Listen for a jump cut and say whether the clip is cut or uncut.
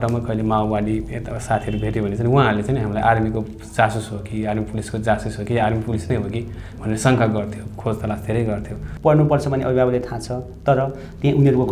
cut